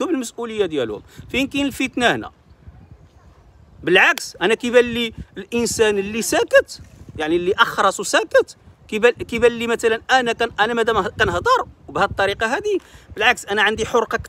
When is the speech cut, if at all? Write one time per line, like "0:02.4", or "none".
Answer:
none